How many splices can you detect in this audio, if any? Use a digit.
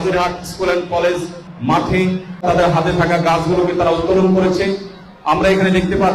2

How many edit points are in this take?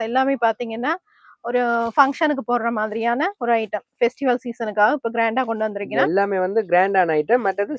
0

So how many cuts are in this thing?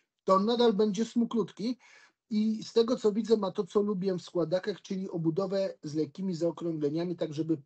0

